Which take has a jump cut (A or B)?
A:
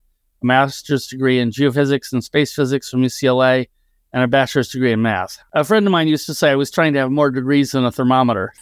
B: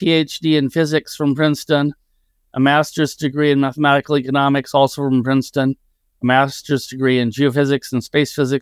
A